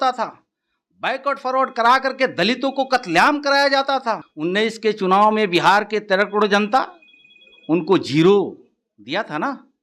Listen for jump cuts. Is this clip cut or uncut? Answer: cut